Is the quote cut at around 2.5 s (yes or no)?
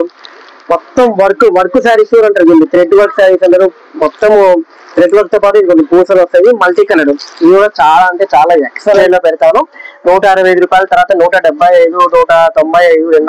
no